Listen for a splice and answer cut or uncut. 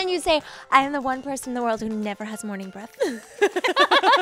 uncut